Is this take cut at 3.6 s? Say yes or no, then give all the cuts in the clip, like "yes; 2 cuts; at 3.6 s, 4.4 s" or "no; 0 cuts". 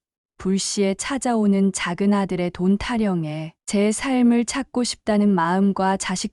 yes; 1 cut; at 3.6 s